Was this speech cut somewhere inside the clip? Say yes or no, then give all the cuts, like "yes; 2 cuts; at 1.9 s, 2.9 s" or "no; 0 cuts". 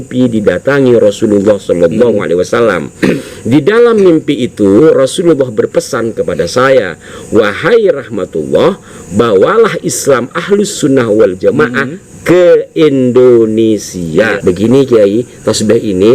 yes; 1 cut; at 14.4 s